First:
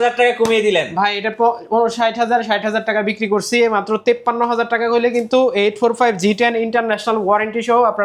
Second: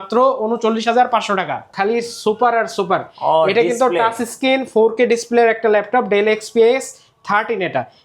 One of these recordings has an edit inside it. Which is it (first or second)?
second